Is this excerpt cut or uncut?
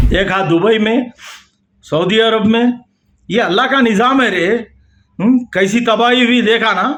uncut